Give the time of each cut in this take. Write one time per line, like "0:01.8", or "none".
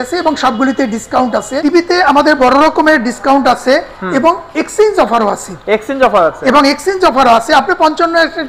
0:01.5

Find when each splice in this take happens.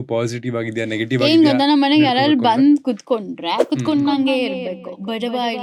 none

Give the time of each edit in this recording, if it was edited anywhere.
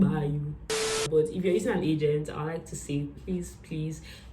0:01.0

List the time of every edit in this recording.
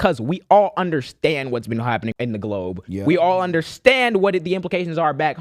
0:02.1

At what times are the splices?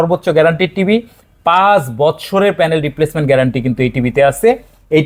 none

